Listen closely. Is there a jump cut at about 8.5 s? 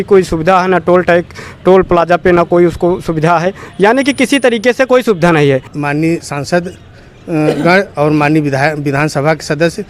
no; 1 cut; at 5.7 s

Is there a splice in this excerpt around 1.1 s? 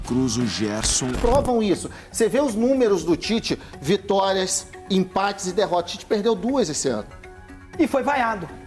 yes; 1 cut; at 1.1 s

